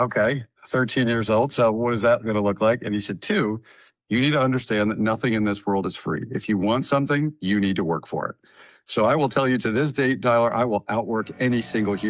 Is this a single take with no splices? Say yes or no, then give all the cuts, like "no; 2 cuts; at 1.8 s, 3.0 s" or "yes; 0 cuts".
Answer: yes; 0 cuts